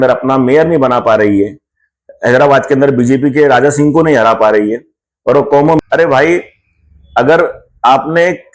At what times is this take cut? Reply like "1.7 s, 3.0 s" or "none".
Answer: 5.8 s